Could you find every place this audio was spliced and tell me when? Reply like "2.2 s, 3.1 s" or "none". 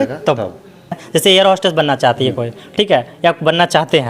1.0 s